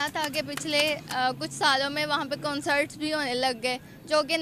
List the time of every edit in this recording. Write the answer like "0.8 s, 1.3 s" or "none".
none